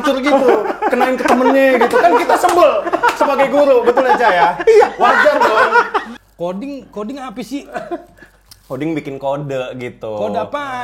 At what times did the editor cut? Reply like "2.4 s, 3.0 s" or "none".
6.0 s